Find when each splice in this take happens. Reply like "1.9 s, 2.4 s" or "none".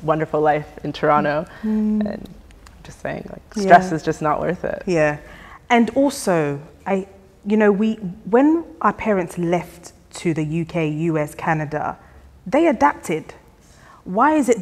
none